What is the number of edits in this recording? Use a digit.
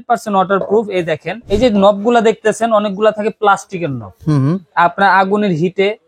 1